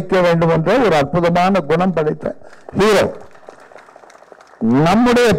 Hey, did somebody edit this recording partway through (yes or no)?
no